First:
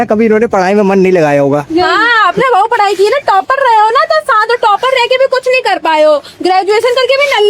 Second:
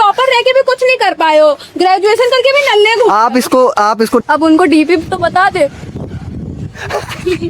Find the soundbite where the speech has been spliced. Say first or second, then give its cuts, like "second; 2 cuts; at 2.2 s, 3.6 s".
second; 1 cut; at 4.2 s